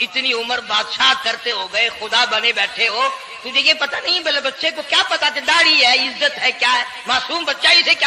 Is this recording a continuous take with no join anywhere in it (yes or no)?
yes